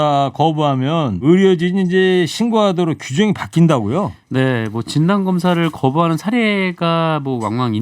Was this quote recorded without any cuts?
no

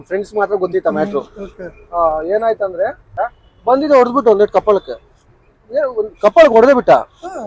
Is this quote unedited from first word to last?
no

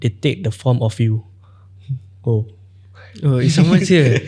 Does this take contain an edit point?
no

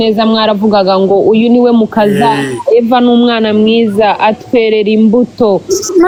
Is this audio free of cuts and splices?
yes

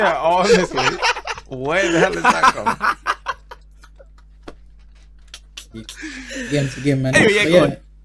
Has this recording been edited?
no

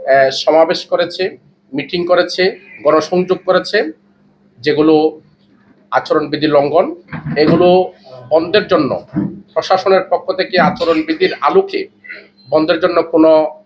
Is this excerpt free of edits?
yes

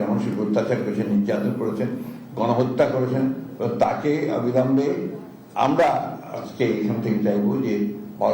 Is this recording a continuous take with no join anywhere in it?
yes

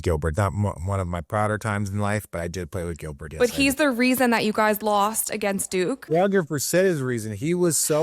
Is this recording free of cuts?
no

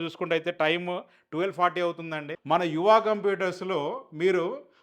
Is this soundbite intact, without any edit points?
no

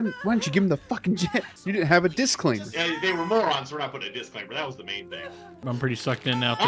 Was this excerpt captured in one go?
no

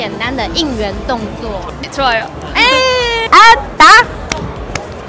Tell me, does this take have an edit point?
yes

